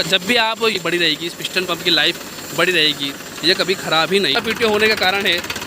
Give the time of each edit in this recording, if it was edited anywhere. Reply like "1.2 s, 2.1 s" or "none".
0.8 s, 4.4 s